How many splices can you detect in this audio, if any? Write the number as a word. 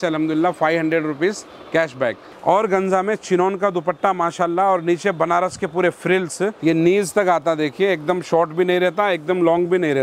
two